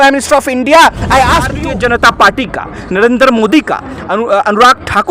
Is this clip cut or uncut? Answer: cut